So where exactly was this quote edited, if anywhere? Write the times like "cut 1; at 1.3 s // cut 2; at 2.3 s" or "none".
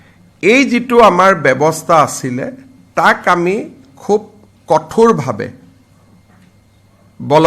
none